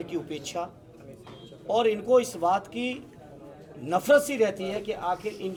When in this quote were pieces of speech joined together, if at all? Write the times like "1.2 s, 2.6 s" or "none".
none